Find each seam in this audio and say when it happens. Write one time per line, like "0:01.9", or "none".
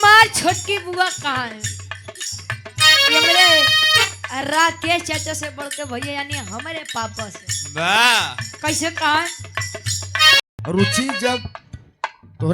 0:10.4